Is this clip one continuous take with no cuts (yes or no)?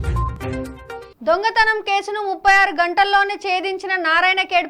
no